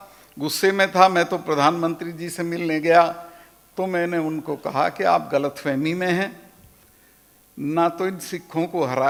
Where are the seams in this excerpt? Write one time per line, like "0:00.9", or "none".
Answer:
none